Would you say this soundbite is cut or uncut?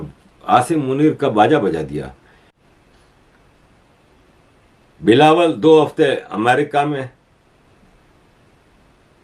cut